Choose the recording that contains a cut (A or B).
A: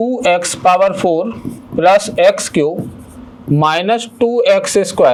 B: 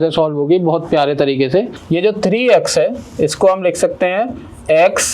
B